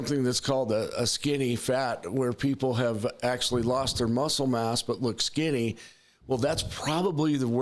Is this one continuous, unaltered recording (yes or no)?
yes